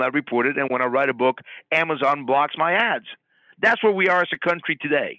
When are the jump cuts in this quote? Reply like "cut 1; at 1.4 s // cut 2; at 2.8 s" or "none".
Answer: none